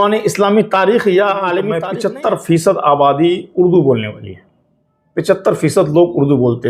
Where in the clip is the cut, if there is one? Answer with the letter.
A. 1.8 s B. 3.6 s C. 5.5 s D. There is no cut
A